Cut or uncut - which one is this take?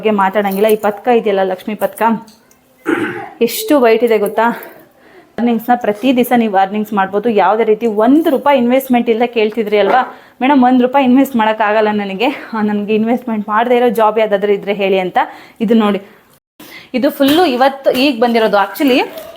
cut